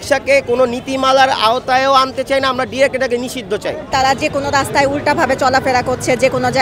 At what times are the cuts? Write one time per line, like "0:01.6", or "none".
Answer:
0:03.9